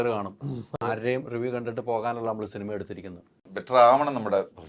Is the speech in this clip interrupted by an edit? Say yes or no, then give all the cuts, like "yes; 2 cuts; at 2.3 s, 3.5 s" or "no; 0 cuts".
yes; 1 cut; at 3.5 s